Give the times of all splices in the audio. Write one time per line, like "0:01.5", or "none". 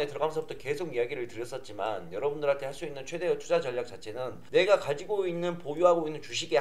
0:04.4